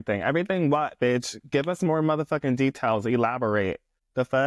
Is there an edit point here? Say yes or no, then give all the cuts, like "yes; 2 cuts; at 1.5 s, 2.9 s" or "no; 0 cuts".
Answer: no; 0 cuts